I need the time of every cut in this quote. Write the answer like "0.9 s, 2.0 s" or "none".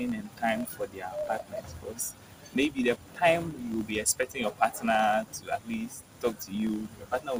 none